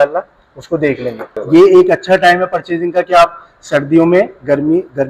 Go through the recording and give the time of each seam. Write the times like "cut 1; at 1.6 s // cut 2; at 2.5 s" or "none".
cut 1; at 1.4 s